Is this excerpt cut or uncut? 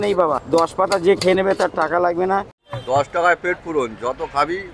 cut